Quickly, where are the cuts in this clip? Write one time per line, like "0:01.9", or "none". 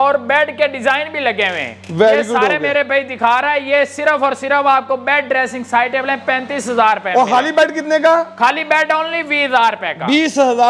none